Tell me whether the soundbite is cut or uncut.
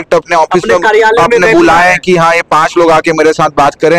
uncut